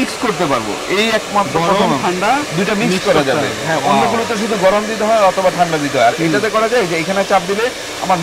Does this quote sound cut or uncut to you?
uncut